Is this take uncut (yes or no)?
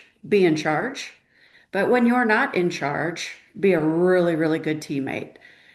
yes